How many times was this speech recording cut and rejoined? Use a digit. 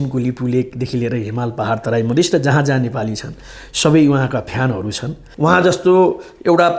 1